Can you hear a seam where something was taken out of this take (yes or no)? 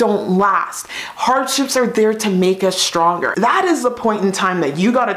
yes